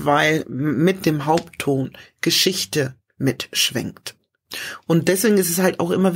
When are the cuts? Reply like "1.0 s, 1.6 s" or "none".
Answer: 4.5 s

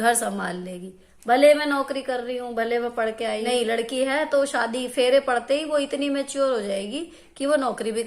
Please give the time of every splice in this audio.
3.5 s

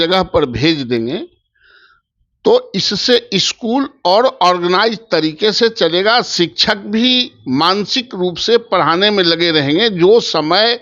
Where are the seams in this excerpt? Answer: none

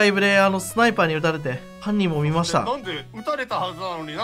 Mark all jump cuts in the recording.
1.7 s, 3.1 s

